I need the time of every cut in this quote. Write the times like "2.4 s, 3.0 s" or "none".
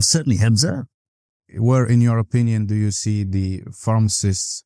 1.0 s